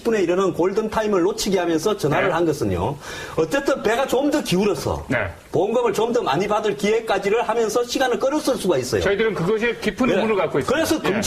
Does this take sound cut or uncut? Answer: cut